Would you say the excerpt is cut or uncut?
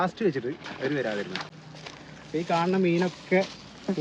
cut